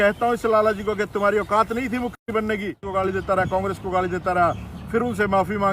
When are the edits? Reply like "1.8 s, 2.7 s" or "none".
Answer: 2.8 s